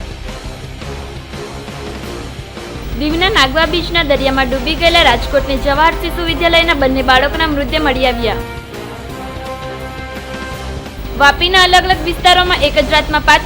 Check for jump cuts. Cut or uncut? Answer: cut